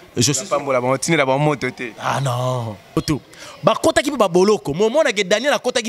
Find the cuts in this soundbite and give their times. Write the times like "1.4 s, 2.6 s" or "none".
3.0 s